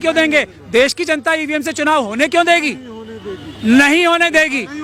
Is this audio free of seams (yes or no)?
yes